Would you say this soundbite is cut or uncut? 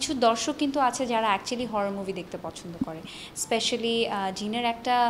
uncut